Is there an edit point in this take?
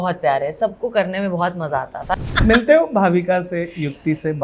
yes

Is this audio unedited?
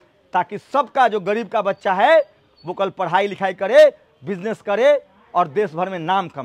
yes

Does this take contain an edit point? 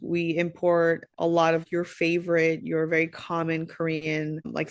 yes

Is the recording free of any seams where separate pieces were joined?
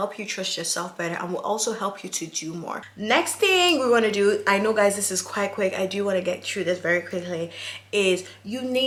yes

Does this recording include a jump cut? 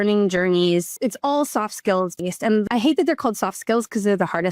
yes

